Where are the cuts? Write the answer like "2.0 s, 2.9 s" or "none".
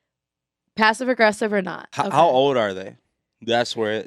1.8 s